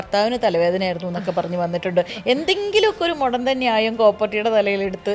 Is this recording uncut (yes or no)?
yes